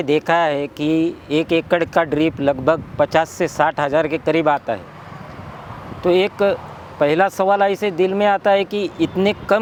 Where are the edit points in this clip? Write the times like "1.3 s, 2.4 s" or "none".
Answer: none

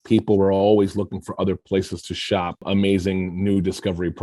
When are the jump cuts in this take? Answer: 2.6 s

